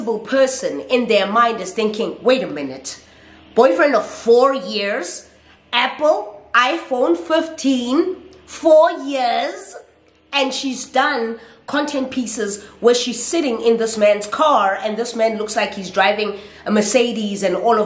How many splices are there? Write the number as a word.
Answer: zero